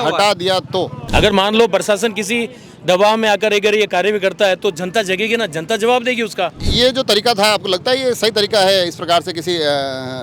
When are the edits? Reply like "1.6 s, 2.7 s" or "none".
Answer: 1.0 s, 6.6 s